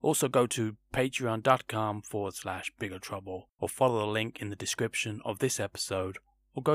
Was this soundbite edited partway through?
yes; 1 cut; at 3.5 s

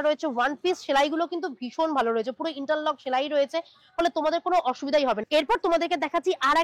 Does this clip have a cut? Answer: no; 0 cuts

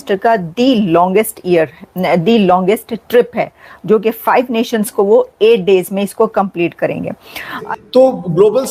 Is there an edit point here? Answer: yes; 1 cut; at 7.7 s

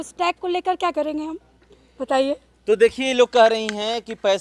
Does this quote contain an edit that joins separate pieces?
no; 0 cuts

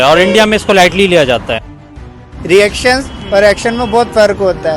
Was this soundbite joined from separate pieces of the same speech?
yes; 1 cut; at 2.2 s

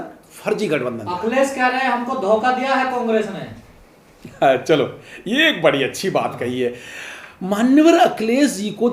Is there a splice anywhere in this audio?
no; 0 cuts

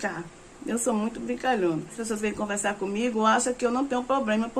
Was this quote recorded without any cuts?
no; 1 cut; at 2.0 s

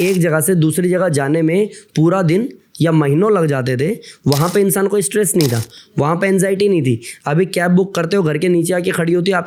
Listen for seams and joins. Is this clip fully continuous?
yes; 0 cuts

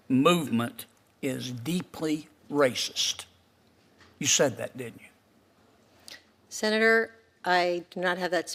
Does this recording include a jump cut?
no; 0 cuts

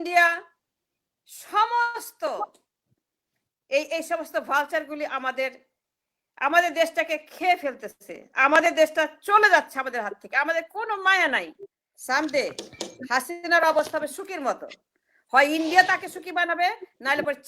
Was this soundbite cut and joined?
yes; 1 cut; at 11.9 s

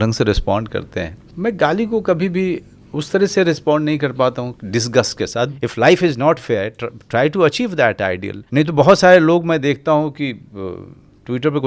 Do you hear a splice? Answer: yes; 3 cuts; at 1.2 s, 5.5 s, 8.3 s

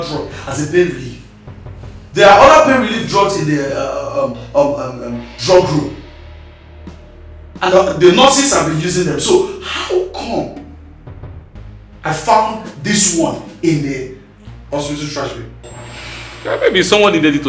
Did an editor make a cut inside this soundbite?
no; 0 cuts

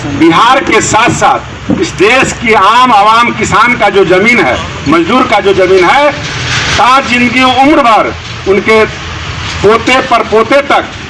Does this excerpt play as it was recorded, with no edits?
yes; 0 cuts

